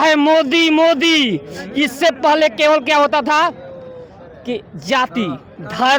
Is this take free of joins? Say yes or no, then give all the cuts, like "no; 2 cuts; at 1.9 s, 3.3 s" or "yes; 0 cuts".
yes; 0 cuts